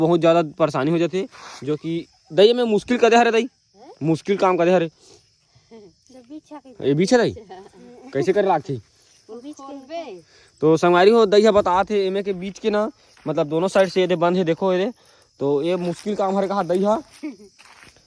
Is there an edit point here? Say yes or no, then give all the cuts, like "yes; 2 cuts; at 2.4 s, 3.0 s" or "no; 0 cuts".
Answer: no; 0 cuts